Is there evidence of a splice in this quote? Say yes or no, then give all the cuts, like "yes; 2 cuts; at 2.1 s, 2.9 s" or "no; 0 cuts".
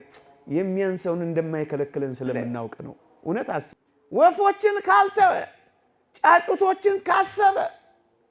yes; 1 cut; at 3.7 s